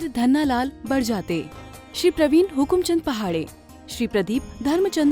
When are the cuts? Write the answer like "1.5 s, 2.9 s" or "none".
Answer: none